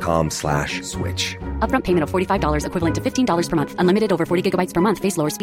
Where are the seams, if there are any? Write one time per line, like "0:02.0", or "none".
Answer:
none